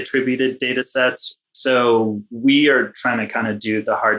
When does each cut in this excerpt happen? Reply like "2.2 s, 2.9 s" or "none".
1.2 s, 2.3 s

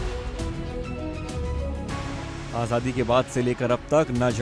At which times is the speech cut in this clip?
none

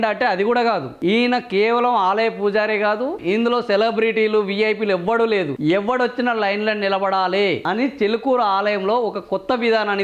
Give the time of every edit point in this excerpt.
3.2 s, 5.5 s

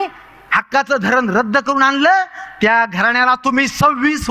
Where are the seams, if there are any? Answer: none

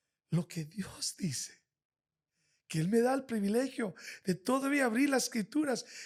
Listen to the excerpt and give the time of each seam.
none

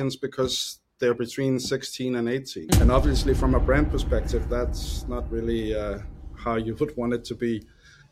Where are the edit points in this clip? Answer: 2.6 s

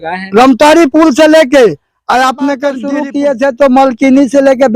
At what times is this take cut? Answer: 2.9 s

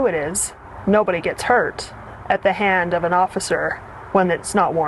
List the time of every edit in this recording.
none

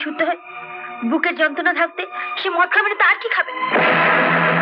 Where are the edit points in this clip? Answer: none

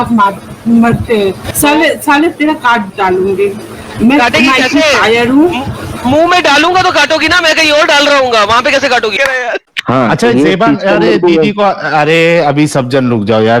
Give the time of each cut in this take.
1.5 s, 9.1 s

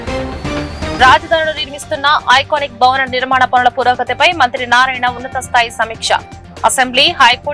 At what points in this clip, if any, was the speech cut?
none

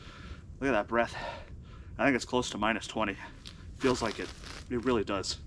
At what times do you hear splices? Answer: none

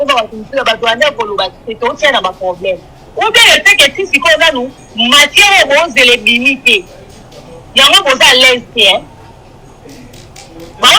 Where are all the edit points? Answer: none

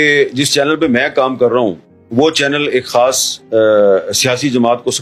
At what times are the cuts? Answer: none

